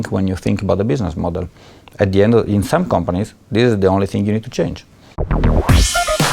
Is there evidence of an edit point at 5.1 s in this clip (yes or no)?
yes